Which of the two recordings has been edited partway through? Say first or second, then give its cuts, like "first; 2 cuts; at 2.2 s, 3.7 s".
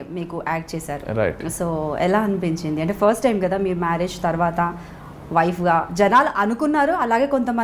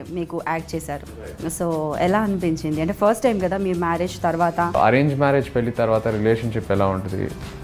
second; 1 cut; at 4.7 s